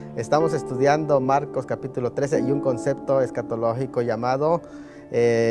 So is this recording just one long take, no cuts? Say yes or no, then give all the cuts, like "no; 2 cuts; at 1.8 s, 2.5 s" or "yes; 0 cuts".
no; 1 cut; at 3.7 s